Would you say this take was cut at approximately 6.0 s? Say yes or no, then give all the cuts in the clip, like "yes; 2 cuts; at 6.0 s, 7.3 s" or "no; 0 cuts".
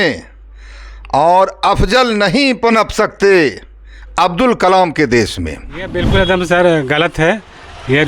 yes; 1 cut; at 6.0 s